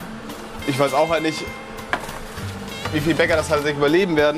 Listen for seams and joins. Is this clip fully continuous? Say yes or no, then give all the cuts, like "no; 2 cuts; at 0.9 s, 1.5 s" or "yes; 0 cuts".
yes; 0 cuts